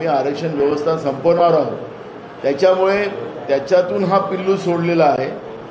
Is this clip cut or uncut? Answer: uncut